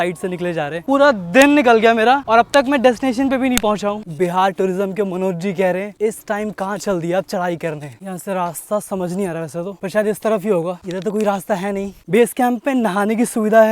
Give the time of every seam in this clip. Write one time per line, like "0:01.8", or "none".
0:00.8
0:04.0
0:07.9
0:12.0